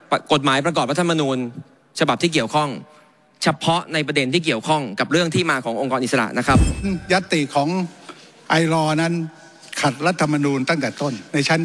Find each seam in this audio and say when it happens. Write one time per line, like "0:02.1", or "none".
0:06.8